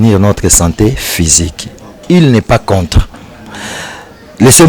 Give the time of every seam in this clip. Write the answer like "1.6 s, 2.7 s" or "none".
none